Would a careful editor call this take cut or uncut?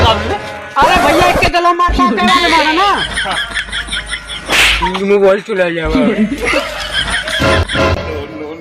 cut